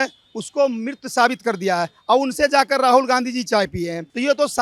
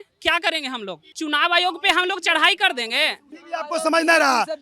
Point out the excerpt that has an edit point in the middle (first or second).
second